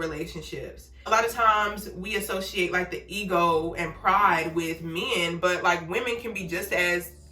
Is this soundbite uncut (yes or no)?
no